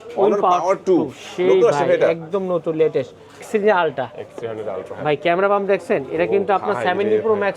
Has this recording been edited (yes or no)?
yes